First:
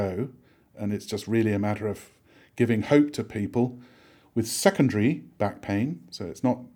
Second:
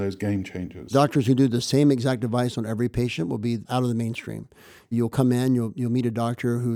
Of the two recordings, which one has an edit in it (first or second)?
second